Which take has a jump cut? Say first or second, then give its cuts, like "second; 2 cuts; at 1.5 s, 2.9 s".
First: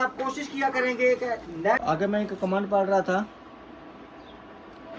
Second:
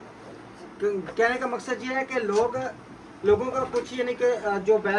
first; 1 cut; at 1.8 s